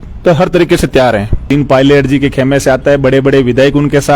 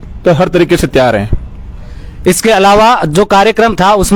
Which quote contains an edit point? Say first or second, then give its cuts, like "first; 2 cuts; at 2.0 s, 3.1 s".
first; 1 cut; at 1.4 s